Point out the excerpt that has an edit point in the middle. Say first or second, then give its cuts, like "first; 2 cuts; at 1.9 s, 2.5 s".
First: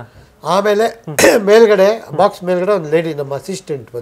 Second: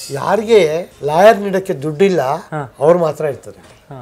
second; 1 cut; at 0.9 s